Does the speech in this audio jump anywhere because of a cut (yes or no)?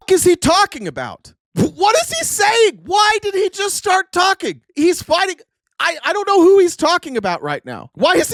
no